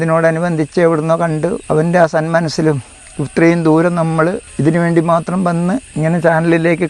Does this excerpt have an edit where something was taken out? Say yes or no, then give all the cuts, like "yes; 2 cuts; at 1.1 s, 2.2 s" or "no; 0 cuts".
yes; 3 cuts; at 1.6 s, 4.5 s, 5.9 s